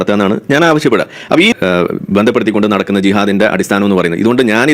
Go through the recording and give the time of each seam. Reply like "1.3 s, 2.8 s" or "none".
1.5 s